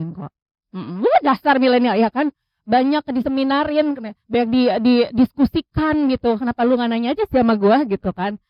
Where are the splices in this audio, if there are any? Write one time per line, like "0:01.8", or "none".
none